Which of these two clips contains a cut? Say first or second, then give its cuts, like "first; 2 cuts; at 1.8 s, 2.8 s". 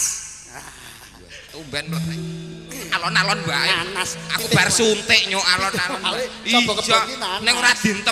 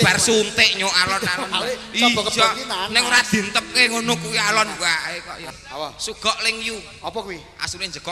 second; 1 cut; at 5.5 s